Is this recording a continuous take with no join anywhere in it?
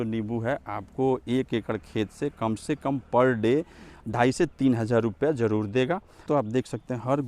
no; 1 cut; at 6.3 s

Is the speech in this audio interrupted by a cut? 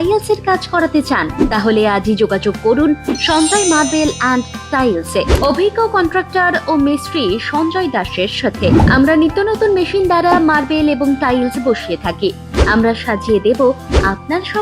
no; 0 cuts

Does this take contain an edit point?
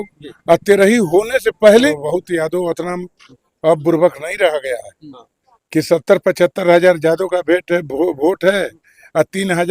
yes; 1 cut; at 1.9 s

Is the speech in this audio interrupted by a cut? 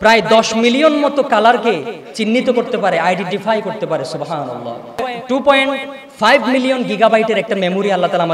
yes; 1 cut; at 5.1 s

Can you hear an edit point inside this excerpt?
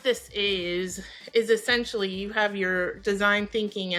no; 0 cuts

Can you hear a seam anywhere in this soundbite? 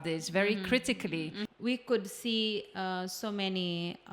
yes; 1 cut; at 1.4 s

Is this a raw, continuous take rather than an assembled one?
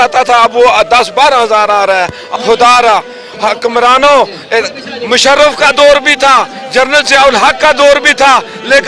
no; 1 cut; at 2.2 s

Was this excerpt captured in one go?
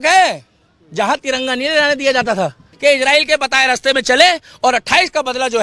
no; 1 cut; at 2.7 s

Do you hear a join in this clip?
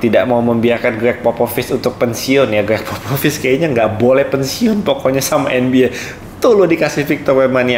no; 0 cuts

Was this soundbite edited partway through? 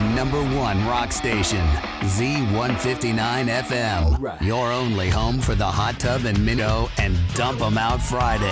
yes; 1 cut; at 6.6 s

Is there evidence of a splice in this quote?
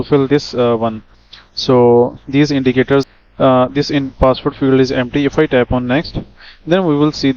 yes; 1 cut; at 3.1 s

